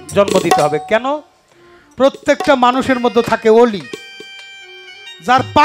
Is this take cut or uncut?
uncut